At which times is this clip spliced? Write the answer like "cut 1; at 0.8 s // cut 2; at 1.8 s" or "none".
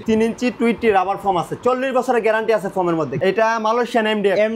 cut 1; at 3.1 s